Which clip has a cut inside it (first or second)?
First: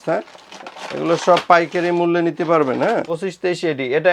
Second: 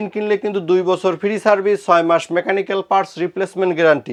first